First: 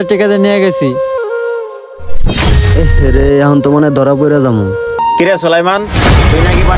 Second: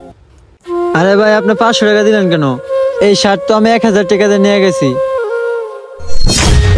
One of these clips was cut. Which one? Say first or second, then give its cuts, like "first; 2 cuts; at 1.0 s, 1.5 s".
first; 1 cut; at 5.0 s